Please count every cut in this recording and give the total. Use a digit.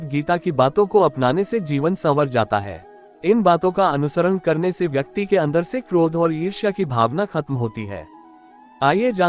1